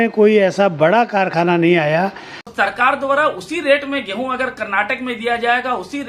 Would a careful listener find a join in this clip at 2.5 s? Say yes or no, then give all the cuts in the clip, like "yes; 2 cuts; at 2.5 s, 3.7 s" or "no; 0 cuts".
yes; 1 cut; at 2.5 s